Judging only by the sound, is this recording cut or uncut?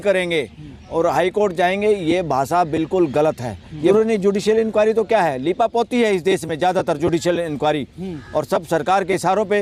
cut